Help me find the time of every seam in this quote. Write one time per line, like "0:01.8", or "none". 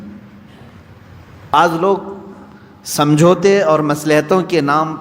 0:01.5